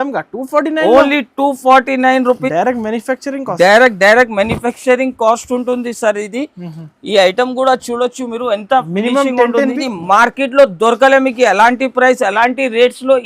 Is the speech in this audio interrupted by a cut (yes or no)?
yes